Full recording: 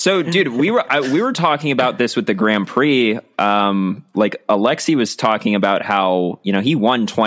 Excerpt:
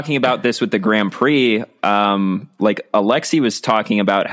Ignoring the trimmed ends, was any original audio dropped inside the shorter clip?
no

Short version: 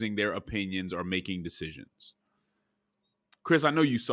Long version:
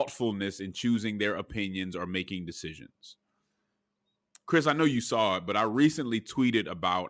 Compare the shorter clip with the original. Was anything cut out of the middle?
no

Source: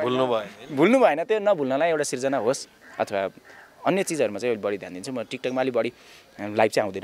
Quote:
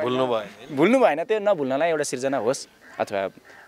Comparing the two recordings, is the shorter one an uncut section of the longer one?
yes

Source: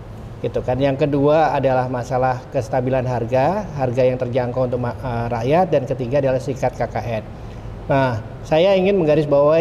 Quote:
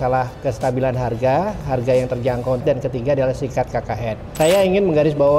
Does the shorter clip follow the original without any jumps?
no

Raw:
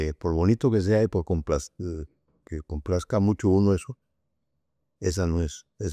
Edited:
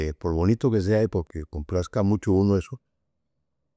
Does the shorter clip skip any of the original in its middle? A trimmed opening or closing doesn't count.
yes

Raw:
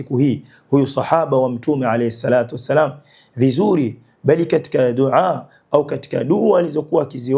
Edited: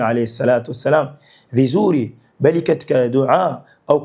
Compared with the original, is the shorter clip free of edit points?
yes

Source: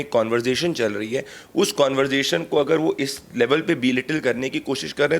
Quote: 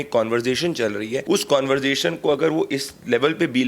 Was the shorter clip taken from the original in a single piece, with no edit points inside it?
no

